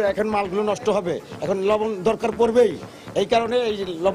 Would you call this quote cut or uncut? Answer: uncut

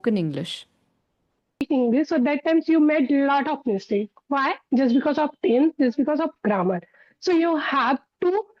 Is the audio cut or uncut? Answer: cut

